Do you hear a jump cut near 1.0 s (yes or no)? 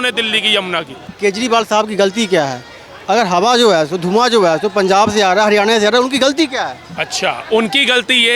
yes